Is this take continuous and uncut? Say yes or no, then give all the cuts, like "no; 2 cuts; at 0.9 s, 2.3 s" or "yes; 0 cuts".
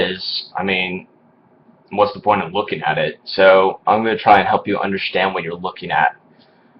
yes; 0 cuts